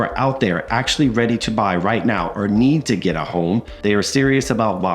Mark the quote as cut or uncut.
cut